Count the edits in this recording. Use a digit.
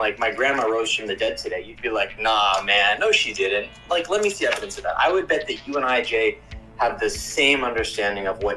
0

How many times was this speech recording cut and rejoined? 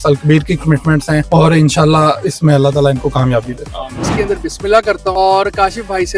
3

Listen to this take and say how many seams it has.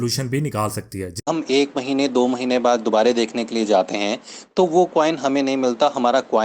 1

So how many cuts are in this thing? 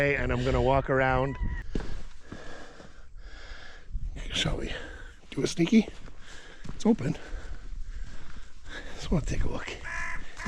1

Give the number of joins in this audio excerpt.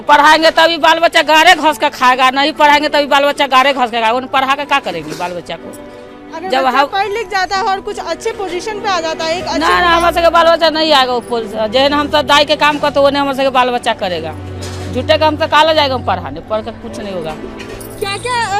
0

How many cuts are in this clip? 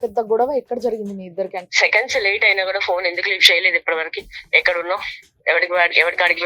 1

